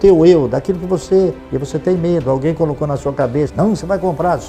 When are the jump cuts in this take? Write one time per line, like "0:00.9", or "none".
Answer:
0:01.4